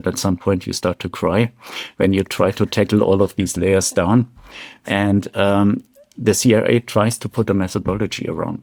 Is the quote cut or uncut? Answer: uncut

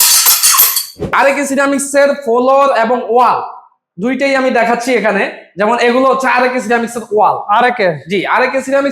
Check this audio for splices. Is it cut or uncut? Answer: cut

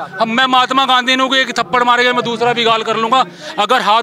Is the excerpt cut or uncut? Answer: uncut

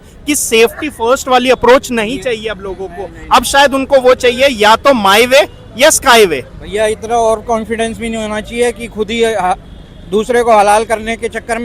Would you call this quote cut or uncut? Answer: uncut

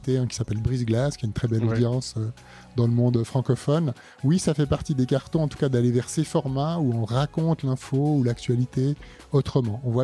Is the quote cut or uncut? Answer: uncut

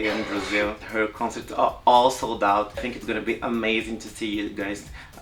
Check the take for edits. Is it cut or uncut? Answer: cut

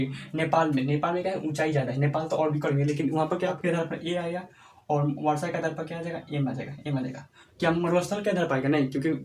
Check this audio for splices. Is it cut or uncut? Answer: cut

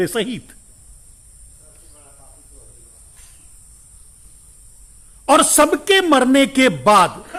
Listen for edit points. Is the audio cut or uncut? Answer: uncut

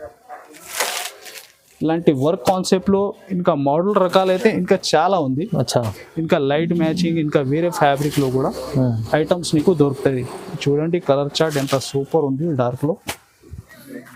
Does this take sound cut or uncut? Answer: uncut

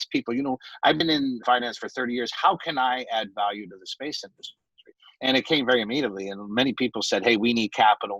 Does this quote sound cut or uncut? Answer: cut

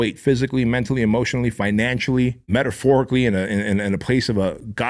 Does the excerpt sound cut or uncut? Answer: cut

